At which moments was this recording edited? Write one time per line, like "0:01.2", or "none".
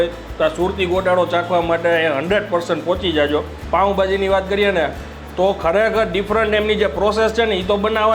0:03.6